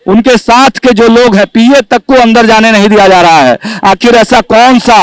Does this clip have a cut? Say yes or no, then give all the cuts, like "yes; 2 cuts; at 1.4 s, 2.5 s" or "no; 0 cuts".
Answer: no; 0 cuts